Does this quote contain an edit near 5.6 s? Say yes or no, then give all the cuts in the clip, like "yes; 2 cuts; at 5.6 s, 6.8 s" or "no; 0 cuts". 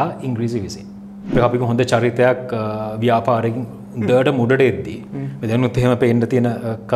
no; 1 cut; at 1.4 s